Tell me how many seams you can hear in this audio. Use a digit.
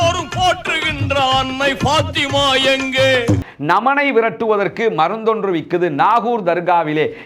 1